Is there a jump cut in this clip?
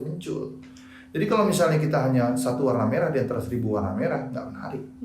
no; 0 cuts

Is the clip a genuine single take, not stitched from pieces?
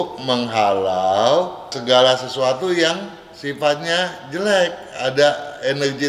no; 1 cut; at 1.8 s

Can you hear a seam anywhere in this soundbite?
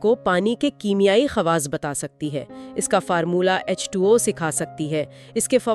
no; 0 cuts

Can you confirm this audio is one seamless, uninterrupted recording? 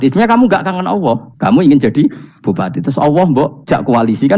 no; 2 cuts; at 1.3 s, 3.6 s

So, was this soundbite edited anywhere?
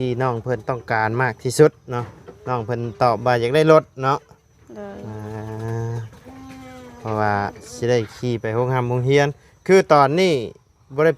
no; 0 cuts

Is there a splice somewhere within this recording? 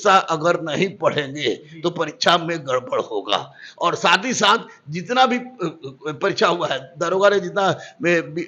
no; 0 cuts

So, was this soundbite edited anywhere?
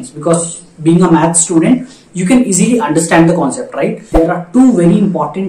yes; 1 cut; at 4.1 s

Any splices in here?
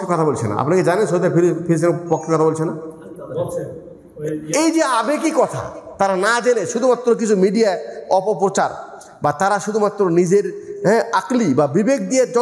no; 0 cuts

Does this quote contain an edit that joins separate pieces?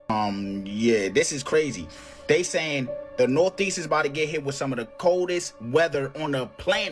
no; 0 cuts

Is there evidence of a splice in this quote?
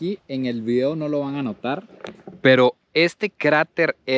no; 0 cuts

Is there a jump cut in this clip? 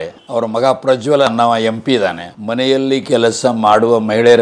yes; 1 cut; at 2.3 s

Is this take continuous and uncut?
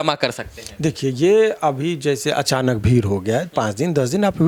yes; 0 cuts

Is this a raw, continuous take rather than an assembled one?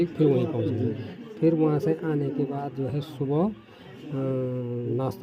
no; 1 cut; at 2.5 s

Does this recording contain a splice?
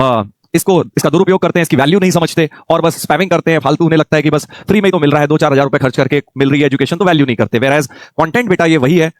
no; 0 cuts

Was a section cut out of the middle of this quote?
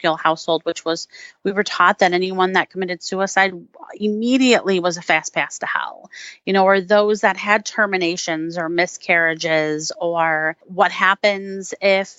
yes; 1 cut; at 10.6 s

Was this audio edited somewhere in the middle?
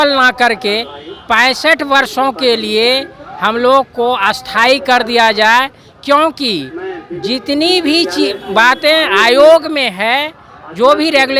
no; 0 cuts

